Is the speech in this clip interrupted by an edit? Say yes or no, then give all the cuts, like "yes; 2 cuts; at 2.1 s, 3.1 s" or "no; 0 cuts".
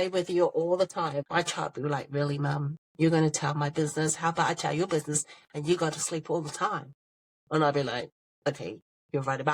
no; 0 cuts